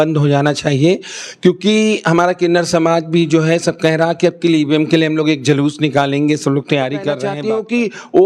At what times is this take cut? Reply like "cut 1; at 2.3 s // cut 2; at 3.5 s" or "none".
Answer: cut 1; at 7.3 s